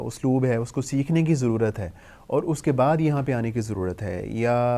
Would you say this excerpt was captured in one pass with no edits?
yes; 0 cuts

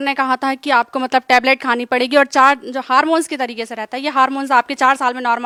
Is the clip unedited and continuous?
yes; 0 cuts

